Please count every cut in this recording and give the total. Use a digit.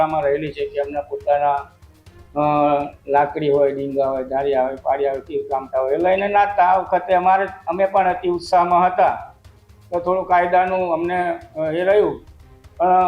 0